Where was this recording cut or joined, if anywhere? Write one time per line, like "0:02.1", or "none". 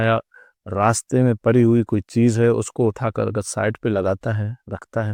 none